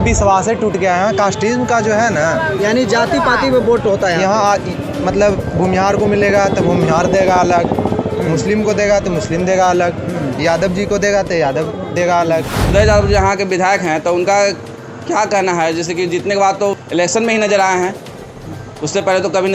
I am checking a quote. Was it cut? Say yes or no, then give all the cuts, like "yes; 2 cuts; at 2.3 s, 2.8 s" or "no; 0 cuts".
yes; 2 cuts; at 12.6 s, 16.7 s